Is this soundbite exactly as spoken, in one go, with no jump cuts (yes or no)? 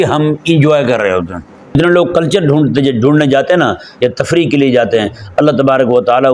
no